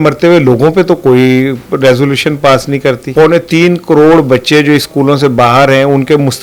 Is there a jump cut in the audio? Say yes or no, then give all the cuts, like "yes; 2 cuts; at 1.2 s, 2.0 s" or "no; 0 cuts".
yes; 1 cut; at 3.0 s